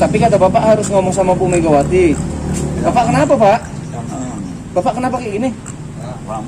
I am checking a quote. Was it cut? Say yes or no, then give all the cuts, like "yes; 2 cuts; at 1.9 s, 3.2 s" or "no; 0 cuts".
no; 0 cuts